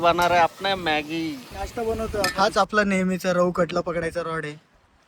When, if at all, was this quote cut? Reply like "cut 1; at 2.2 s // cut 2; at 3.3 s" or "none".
cut 1; at 2.3 s